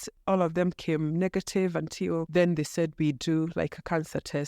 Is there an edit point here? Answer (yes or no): yes